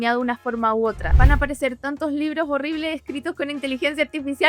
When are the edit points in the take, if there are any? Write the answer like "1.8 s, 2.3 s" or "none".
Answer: 1.1 s